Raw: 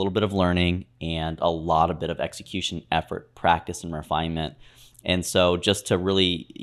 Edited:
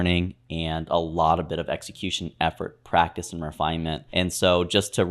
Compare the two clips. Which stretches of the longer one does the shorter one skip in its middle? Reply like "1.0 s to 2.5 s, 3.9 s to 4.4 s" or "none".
4.5 s to 5.0 s